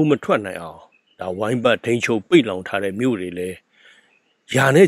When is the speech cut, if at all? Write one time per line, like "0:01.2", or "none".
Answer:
none